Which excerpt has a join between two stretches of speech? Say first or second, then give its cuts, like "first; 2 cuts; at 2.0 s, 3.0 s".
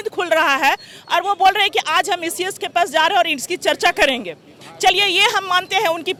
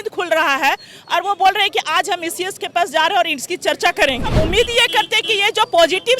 second; 1 cut; at 4.3 s